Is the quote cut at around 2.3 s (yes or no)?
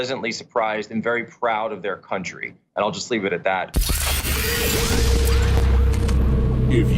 no